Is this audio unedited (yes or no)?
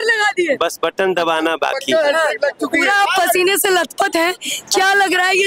yes